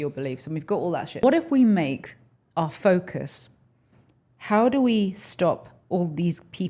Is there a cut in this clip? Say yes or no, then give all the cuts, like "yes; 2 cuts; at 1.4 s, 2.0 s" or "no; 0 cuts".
yes; 1 cut; at 1.2 s